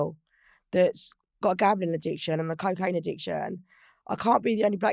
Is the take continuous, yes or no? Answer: yes